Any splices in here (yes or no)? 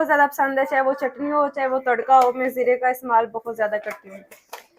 no